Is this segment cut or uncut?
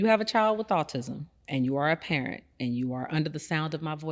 uncut